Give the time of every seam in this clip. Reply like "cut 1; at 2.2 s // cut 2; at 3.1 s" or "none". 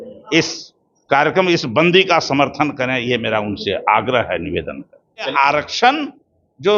cut 1; at 5.3 s